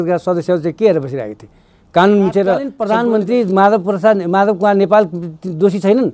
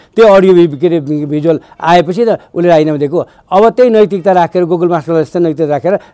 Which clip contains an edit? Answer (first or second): first